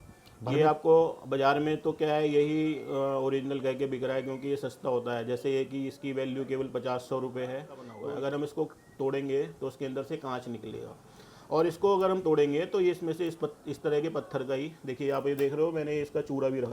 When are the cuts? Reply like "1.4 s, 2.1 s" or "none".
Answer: 7.9 s